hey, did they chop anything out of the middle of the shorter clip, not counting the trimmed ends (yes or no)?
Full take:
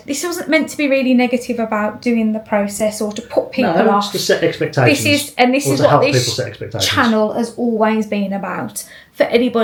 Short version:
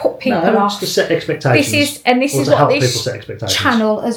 no